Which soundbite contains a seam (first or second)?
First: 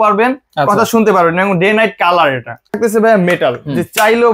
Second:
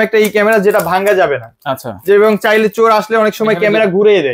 first